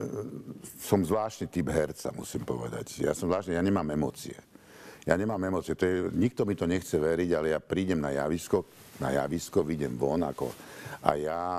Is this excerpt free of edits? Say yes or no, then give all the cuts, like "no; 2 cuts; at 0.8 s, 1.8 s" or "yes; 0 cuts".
yes; 0 cuts